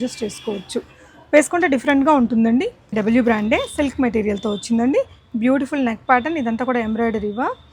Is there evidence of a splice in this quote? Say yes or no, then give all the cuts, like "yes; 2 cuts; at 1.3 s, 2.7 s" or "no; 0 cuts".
yes; 1 cut; at 2.9 s